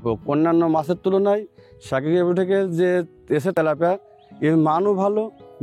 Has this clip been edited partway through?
no; 0 cuts

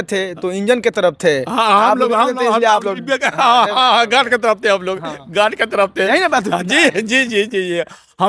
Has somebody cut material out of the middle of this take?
no; 0 cuts

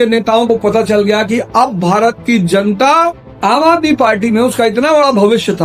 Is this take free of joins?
no; 1 cut; at 3.2 s

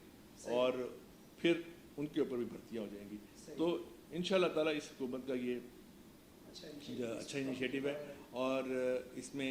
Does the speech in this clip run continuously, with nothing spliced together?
yes; 0 cuts

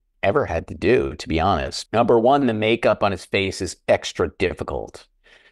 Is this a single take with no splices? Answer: no; 1 cut; at 1.7 s

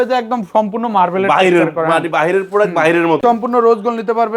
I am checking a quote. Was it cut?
yes; 1 cut; at 3.2 s

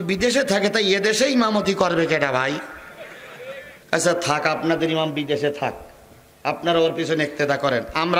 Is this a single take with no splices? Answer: yes; 0 cuts

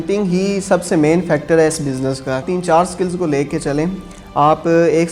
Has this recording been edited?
yes; 1 cut; at 2.4 s

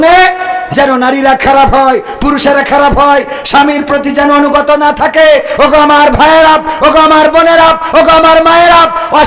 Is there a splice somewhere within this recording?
no; 0 cuts

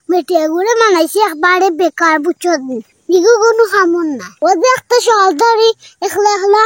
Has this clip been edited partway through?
yes; 1 cut; at 4.4 s

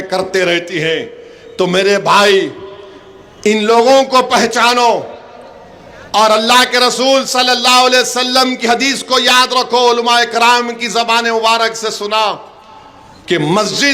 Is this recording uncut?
yes; 0 cuts

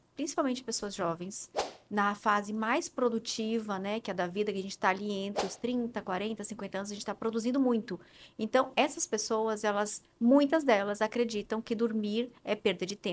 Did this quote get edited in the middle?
no; 0 cuts

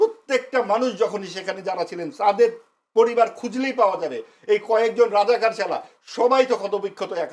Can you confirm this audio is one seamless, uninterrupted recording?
yes; 0 cuts

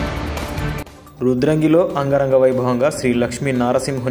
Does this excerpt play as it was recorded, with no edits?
yes; 0 cuts

